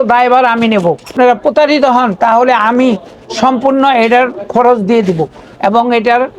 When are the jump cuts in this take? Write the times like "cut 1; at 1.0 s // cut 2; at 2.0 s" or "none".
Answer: cut 1; at 1.1 s